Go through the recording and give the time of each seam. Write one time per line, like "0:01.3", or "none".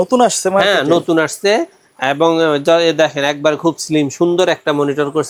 none